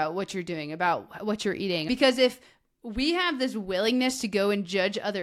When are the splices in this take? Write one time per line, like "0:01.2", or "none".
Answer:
0:01.9